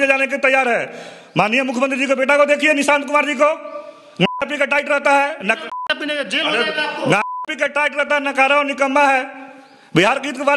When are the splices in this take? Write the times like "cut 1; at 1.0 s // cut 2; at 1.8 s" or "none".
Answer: none